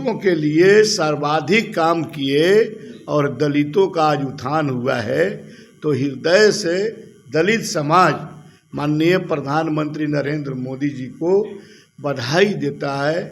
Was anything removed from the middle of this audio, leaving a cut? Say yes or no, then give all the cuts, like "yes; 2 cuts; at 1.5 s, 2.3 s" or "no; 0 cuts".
no; 0 cuts